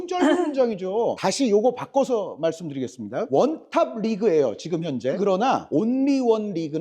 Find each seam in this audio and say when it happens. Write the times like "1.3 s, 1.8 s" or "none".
5.2 s